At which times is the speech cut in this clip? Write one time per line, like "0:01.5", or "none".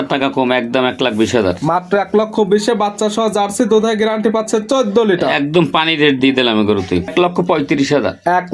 0:07.1